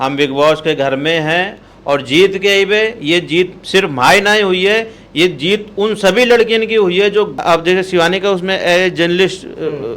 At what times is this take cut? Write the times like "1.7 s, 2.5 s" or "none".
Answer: 7.3 s